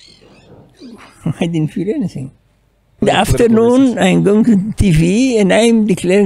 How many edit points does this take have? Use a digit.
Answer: 1